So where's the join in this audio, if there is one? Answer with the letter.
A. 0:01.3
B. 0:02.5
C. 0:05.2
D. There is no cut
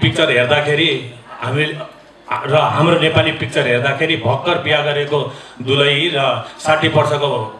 D